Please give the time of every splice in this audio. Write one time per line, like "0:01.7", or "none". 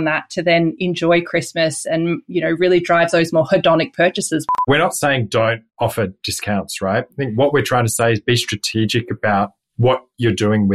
0:04.5
0:05.7
0:09.6